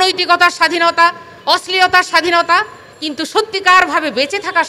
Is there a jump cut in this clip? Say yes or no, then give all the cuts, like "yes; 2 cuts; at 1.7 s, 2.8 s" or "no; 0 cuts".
no; 0 cuts